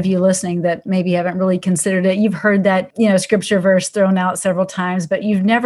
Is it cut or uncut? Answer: cut